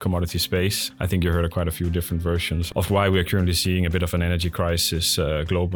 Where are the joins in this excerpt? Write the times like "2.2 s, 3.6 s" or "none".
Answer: none